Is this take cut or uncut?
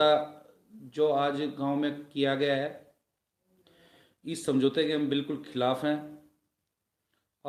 uncut